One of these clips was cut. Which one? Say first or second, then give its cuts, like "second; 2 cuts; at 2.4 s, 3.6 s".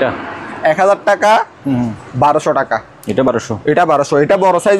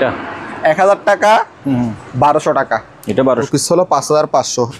second; 1 cut; at 3.3 s